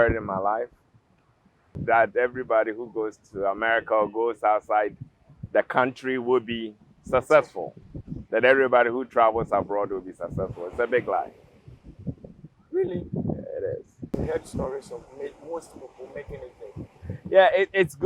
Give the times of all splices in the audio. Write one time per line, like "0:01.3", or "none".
0:01.8
0:14.1

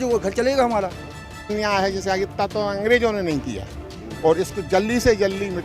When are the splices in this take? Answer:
0:01.5

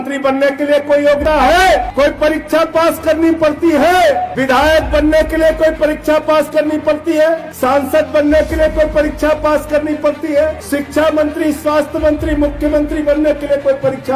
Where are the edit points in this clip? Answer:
0:01.2
0:01.9
0:04.3
0:07.5
0:10.6

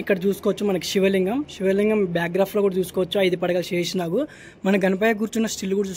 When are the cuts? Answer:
none

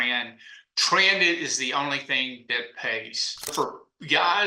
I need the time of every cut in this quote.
0:03.5

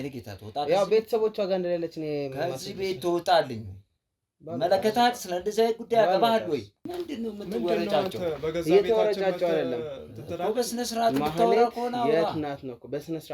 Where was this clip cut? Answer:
0:06.8

